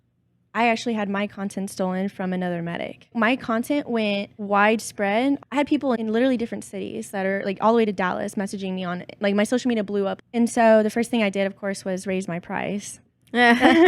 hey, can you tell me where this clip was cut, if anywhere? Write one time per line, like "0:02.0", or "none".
0:03.1
0:04.3
0:05.4
0:10.2